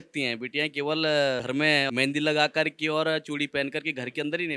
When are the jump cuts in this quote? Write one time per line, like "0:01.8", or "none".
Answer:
0:01.7